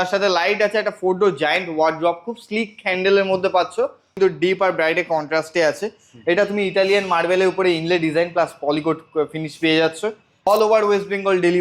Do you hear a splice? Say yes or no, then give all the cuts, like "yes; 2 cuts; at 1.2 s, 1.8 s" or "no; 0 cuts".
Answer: yes; 2 cuts; at 4.1 s, 10.5 s